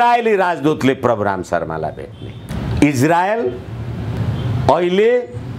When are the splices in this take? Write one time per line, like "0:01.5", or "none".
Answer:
0:02.5
0:04.1